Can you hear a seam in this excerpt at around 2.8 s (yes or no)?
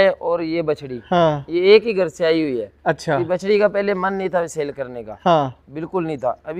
no